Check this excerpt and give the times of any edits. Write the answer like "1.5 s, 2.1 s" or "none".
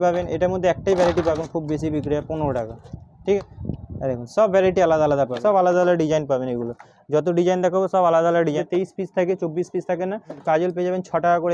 1.4 s, 3.4 s, 5.4 s, 8.6 s, 10.3 s